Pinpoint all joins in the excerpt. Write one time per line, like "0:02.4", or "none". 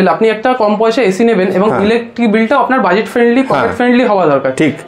none

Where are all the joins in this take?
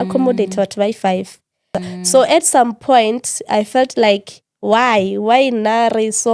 0:01.7

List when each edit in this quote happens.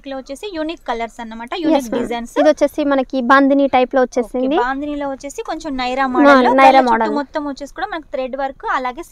none

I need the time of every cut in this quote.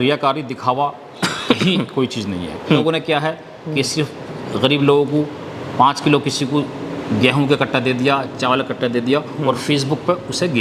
0:02.8

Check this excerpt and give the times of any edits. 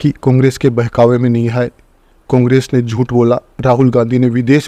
none

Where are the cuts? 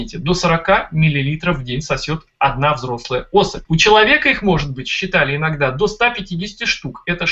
none

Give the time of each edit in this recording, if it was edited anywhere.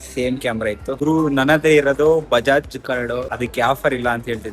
0:01.0
0:03.3

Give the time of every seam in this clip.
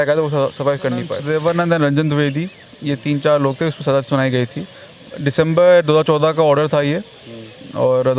0:01.2

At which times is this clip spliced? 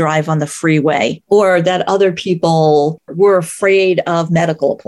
0:01.2
0:03.1

